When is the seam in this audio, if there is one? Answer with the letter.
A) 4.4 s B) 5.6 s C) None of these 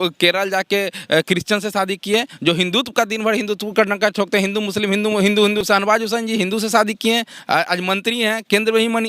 B